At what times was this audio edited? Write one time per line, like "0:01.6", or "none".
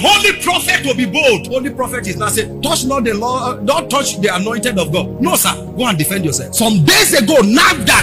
none

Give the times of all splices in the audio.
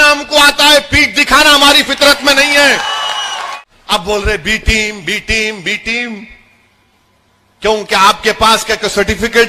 0:03.6

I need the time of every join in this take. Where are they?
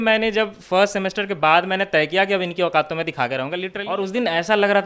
0:03.7

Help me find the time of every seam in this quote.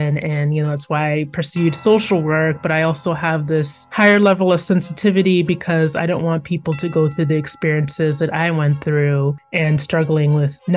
none

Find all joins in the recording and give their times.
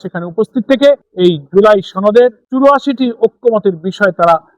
0:01.1
0:02.4

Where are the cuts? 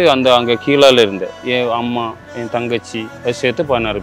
0:01.3
0:03.1

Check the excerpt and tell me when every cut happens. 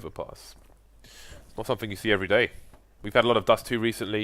0:03.2

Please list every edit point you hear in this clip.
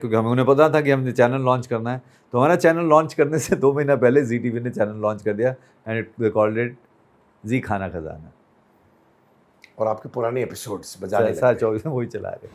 none

